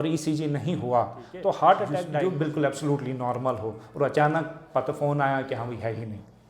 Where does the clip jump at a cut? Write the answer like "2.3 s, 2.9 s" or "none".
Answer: 2.2 s